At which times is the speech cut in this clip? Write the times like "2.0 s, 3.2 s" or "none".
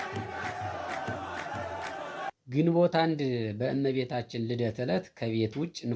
2.3 s